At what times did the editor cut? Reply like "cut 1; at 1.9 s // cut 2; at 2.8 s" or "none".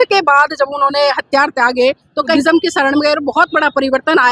cut 1; at 2.3 s

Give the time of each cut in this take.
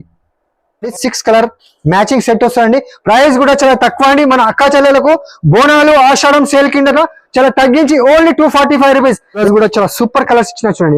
cut 1; at 1.0 s // cut 2; at 9.4 s

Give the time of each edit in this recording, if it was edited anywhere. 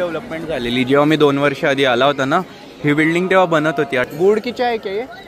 cut 1; at 4.0 s

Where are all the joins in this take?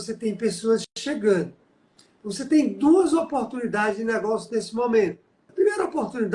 cut 1; at 5.4 s

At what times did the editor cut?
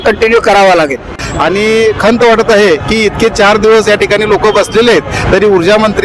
cut 1; at 1.2 s

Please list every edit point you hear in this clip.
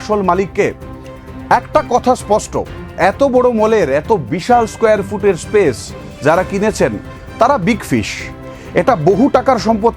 none

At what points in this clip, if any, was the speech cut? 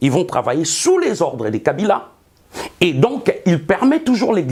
none

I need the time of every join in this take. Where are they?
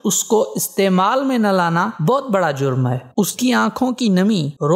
none

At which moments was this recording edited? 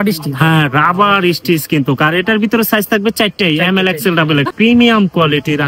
cut 1; at 4.5 s

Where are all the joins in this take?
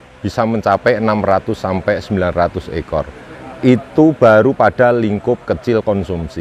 none

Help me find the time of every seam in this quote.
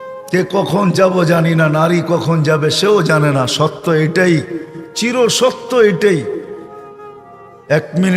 none

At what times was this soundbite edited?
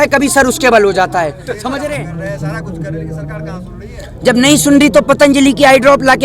cut 1; at 2.0 s

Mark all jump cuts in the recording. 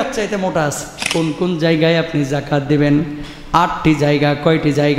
cut 1; at 1.1 s

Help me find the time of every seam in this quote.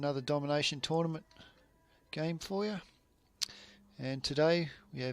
cut 1; at 1.0 s

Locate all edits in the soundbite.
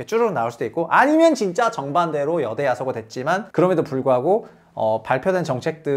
cut 1; at 3.5 s

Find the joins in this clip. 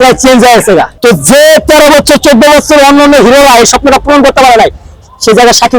cut 1; at 0.9 s

